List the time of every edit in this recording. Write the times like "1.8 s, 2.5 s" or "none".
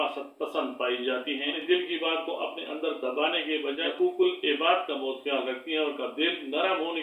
1.5 s, 3.9 s